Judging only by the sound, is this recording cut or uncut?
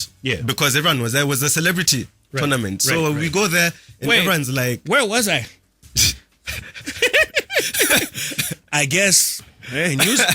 uncut